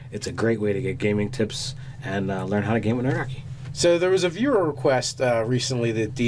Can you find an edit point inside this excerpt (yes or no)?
no